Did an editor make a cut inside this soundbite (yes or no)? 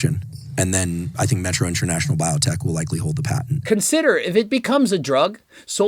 yes